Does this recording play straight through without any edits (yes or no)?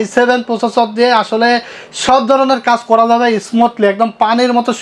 yes